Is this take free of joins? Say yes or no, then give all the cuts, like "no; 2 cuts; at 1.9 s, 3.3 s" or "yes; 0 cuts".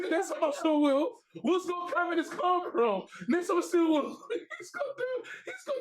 yes; 0 cuts